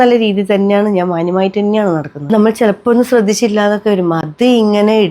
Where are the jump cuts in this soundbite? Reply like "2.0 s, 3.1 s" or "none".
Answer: 2.3 s